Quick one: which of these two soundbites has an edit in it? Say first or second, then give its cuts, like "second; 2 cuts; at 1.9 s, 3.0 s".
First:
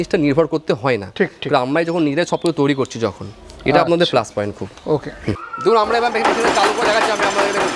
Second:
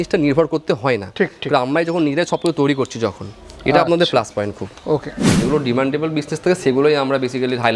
second; 1 cut; at 5.4 s